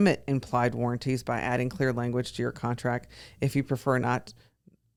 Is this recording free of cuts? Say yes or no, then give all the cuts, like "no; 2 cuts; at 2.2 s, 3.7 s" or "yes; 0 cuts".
yes; 0 cuts